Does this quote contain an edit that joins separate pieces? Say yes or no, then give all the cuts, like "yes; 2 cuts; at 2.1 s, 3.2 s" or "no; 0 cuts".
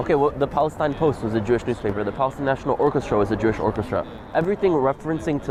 no; 0 cuts